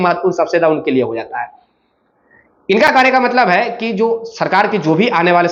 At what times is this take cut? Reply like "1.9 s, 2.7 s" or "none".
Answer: none